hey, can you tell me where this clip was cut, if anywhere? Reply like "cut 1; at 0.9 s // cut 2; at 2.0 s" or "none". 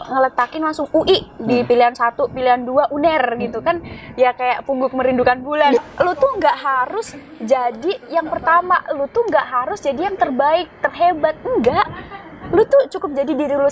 cut 1; at 5.8 s